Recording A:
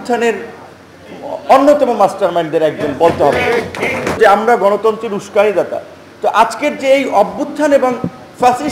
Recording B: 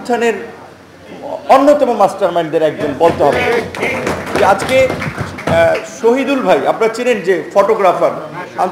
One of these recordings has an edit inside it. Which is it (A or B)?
A